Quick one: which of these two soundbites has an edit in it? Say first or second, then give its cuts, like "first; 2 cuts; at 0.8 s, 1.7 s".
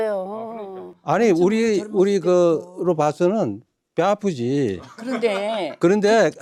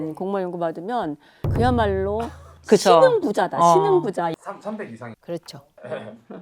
second; 1 cut; at 4.3 s